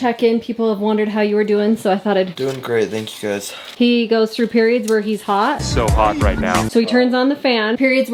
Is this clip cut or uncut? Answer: uncut